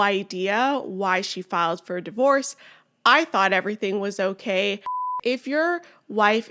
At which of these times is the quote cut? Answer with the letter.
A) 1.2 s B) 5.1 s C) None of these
B